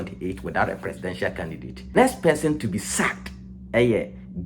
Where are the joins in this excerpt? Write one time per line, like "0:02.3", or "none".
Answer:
0:01.9